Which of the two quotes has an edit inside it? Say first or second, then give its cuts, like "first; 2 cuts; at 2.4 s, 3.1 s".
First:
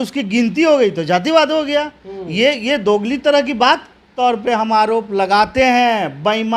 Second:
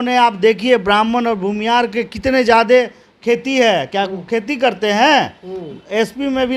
first; 1 cut; at 4.0 s